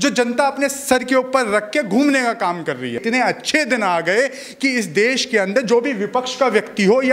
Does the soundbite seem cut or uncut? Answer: cut